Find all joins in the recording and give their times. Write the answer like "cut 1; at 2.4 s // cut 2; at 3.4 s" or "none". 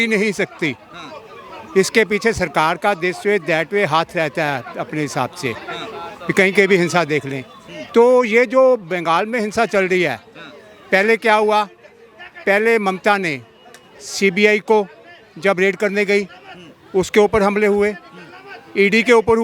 none